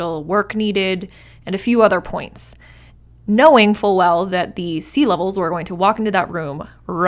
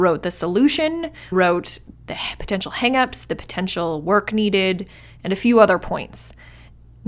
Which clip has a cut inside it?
second; 1 cut; at 1.3 s

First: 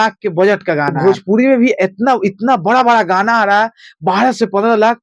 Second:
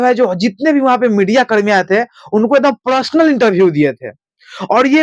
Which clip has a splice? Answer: first; 1 cut; at 0.9 s

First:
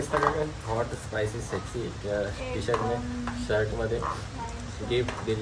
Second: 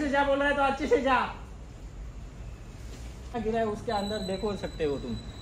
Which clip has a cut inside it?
second; 1 cut; at 3.4 s

